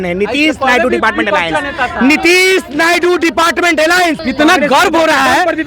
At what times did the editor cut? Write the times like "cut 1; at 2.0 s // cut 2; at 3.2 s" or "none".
cut 1; at 4.2 s

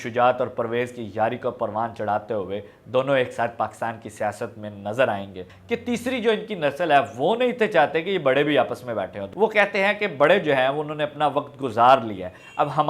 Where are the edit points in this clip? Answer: cut 1; at 5.5 s // cut 2; at 9.2 s

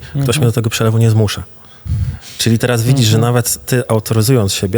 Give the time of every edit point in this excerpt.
none

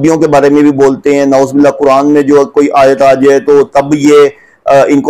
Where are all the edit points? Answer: none

